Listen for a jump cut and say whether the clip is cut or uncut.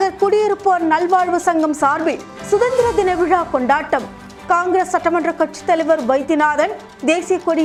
uncut